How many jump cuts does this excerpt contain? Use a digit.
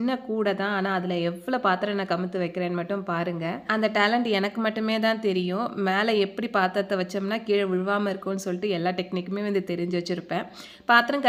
0